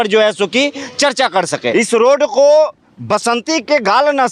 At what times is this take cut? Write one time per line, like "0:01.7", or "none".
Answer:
0:01.7